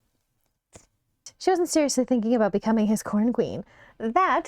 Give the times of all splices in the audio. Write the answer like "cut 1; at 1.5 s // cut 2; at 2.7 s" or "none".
cut 1; at 1.3 s